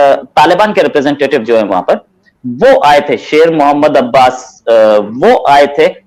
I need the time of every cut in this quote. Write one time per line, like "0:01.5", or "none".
none